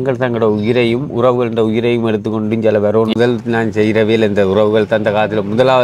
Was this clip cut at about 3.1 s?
yes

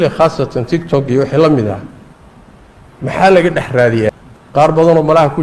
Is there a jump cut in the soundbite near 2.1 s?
no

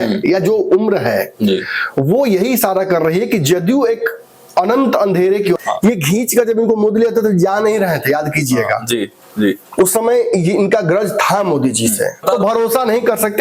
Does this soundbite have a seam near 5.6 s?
yes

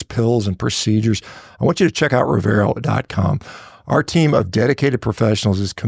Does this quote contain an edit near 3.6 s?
no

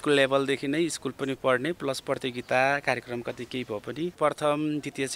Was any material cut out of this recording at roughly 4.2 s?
yes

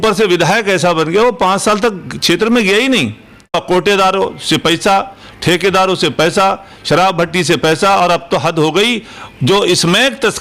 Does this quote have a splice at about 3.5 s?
yes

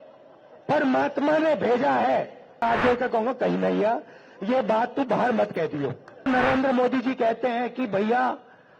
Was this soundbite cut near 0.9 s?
no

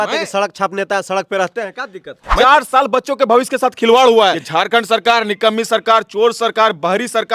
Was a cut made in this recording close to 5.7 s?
no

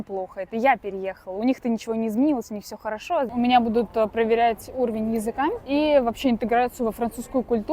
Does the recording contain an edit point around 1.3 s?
no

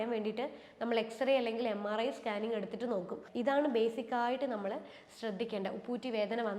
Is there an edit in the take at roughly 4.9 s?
no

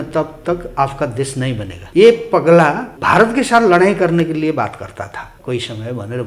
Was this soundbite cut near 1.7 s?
yes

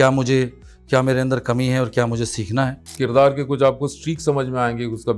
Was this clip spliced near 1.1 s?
no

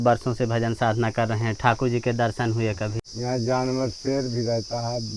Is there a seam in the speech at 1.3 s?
no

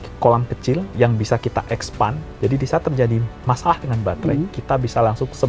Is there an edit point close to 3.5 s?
no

